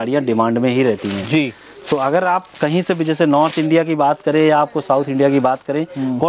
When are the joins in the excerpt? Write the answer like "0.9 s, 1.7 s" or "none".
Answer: none